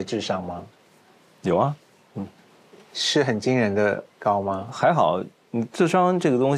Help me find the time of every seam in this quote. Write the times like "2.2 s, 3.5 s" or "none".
4.7 s